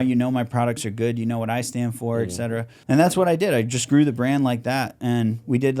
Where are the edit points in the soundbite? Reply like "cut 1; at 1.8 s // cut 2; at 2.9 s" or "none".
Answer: cut 1; at 2.7 s